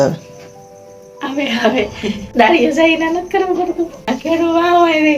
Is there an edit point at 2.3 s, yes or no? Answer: yes